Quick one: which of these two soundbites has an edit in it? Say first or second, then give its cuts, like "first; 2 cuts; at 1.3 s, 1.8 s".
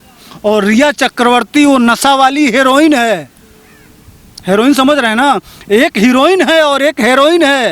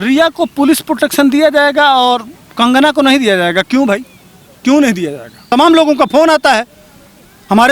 second; 1 cut; at 5.3 s